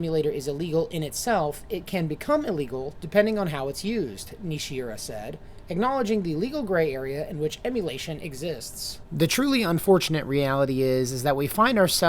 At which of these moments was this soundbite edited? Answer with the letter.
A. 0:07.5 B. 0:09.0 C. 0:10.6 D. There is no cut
B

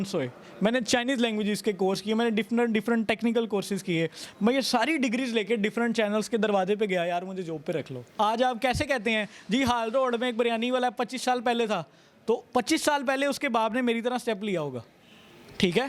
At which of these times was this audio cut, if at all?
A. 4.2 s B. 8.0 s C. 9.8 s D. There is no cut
B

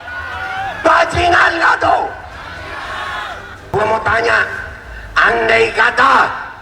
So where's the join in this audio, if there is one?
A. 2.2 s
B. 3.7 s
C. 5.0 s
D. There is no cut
B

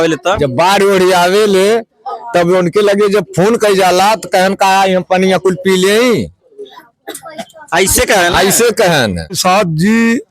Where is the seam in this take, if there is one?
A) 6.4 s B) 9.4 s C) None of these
B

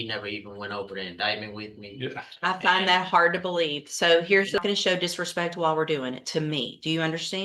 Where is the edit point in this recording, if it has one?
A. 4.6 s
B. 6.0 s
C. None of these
A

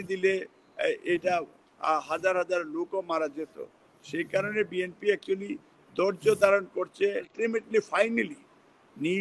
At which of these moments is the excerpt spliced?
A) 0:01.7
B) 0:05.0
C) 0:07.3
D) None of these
C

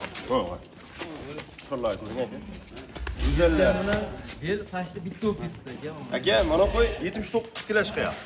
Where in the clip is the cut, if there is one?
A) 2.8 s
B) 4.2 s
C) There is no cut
C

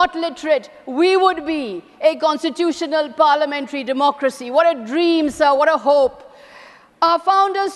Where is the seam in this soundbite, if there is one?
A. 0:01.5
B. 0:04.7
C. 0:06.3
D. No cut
D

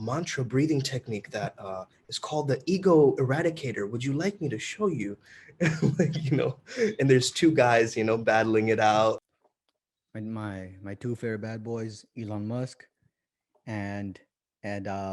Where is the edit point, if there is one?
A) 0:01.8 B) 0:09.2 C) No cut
B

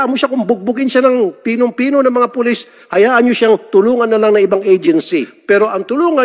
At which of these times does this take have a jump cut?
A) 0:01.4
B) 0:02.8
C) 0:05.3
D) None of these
C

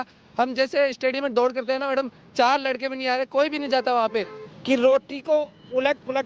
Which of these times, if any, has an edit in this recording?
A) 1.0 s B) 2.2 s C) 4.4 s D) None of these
C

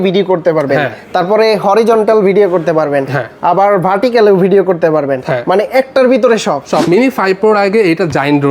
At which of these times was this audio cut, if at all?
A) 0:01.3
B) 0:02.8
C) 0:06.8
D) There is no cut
C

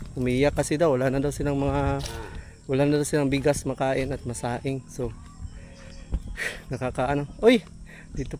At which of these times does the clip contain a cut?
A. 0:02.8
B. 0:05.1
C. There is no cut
C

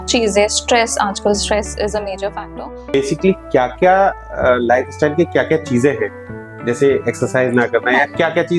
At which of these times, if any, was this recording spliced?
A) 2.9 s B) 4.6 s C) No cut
A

